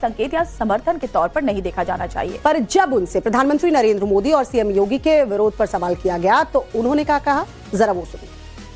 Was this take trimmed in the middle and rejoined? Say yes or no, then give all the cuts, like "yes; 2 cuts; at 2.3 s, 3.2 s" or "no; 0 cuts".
yes; 1 cut; at 6.5 s